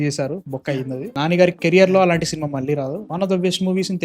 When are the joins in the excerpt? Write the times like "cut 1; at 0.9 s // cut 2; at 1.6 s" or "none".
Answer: cut 1; at 3.0 s